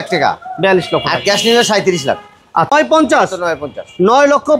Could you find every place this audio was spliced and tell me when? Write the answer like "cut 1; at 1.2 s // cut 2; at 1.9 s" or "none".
cut 1; at 2.7 s